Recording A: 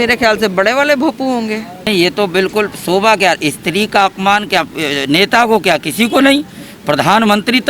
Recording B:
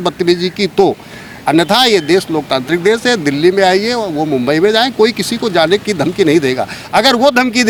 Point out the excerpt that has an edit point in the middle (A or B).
A